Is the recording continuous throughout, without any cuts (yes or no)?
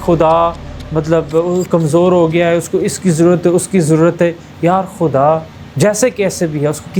no